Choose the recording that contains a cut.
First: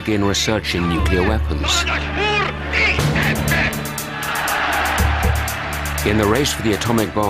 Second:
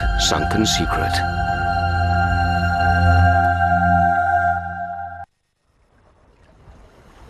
second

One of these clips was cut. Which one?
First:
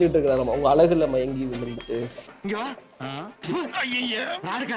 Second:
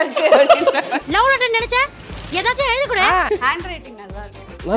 second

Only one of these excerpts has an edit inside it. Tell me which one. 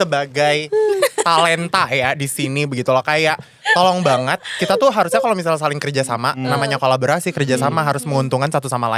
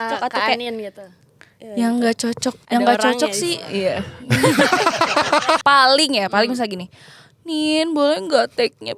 second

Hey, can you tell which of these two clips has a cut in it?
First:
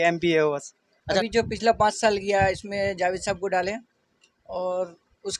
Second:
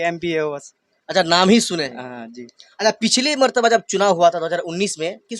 first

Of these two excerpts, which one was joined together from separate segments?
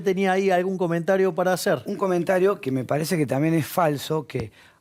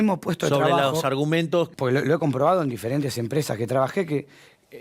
second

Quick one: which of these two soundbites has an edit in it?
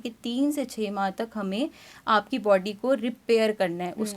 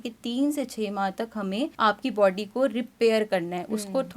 second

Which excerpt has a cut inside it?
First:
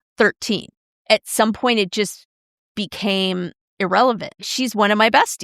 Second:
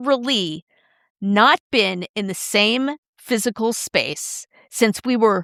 first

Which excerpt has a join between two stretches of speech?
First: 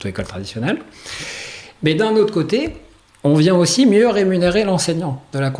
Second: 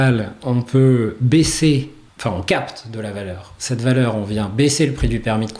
second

